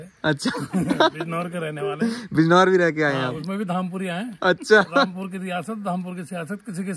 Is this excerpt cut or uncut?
uncut